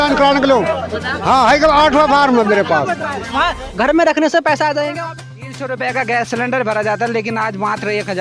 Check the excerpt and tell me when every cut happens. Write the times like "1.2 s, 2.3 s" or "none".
4.9 s